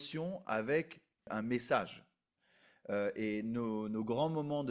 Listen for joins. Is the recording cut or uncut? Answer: cut